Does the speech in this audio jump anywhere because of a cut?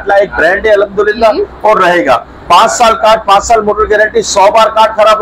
no; 0 cuts

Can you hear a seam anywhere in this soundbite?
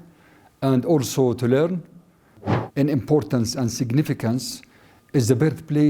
yes; 1 cut; at 2.4 s

